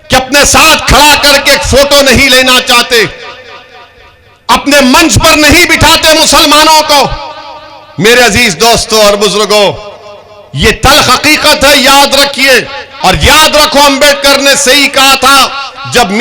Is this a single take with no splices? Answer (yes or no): no